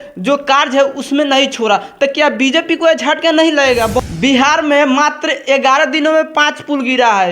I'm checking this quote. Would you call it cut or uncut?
cut